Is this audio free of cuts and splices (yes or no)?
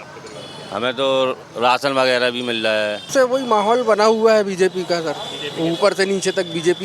no